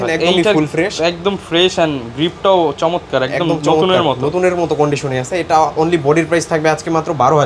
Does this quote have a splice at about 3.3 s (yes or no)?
no